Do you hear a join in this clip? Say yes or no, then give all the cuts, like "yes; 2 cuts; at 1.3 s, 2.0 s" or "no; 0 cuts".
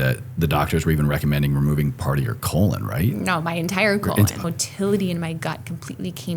yes; 1 cut; at 4.4 s